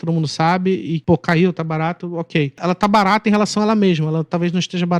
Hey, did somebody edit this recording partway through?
yes; 2 cuts; at 1.0 s, 2.6 s

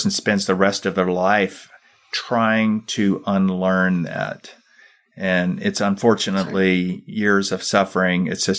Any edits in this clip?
no; 0 cuts

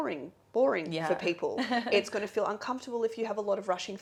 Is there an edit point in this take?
no; 0 cuts

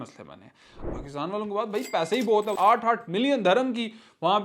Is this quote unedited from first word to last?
no; 2 cuts; at 0.8 s, 2.5 s

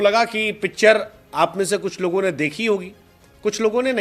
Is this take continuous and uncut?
yes; 0 cuts

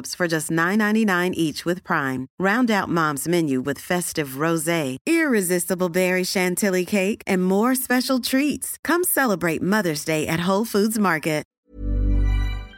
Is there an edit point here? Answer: yes; 1 cut; at 11.5 s

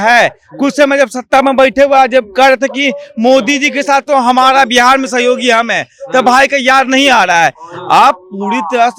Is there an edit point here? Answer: no; 0 cuts

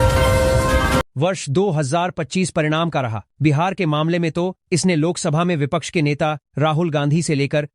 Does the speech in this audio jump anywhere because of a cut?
yes; 1 cut; at 1.1 s

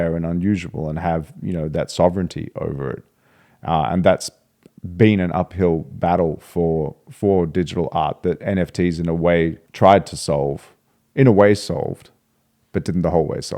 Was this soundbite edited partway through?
yes; 1 cut; at 9.6 s

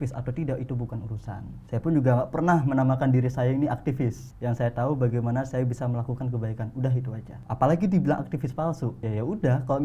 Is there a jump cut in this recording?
yes; 4 cuts; at 1.5 s, 4.3 s, 7.3 s, 9.0 s

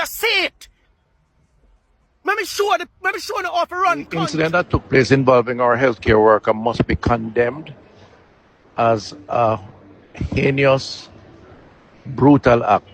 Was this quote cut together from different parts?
yes; 1 cut; at 4.3 s

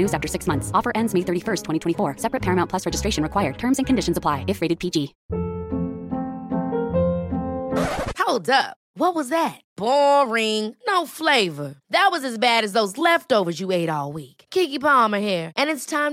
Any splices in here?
yes; 1 cut; at 5.2 s

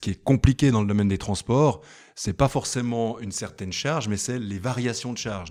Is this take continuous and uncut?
yes; 0 cuts

